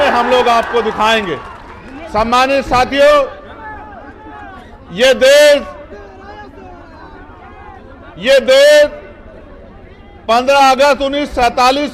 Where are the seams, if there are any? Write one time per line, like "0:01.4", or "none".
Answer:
none